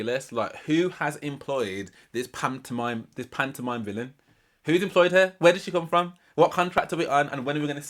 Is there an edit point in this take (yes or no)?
no